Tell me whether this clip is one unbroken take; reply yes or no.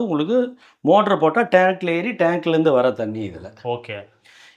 yes